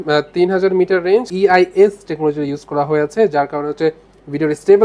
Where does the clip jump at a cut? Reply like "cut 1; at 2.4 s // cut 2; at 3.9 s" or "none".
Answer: cut 1; at 1.3 s